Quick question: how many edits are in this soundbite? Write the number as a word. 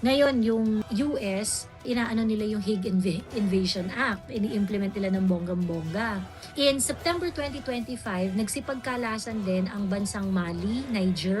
one